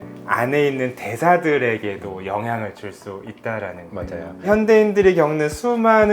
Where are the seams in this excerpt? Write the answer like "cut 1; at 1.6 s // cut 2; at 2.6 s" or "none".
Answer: cut 1; at 4.5 s